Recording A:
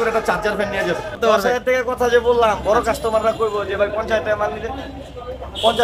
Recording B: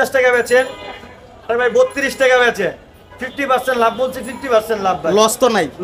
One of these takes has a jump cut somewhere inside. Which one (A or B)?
A